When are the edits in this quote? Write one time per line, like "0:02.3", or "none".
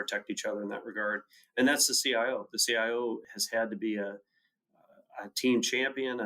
0:03.3